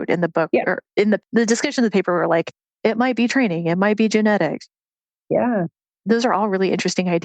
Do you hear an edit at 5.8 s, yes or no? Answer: yes